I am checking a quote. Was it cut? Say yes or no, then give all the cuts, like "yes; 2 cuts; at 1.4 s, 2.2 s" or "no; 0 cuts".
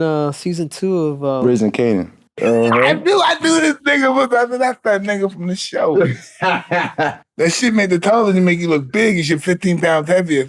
yes; 1 cut; at 2.4 s